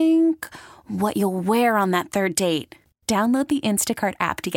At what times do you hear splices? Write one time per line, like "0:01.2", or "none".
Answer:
none